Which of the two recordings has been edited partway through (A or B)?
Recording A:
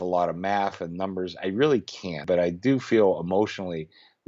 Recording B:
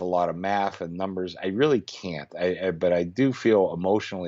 A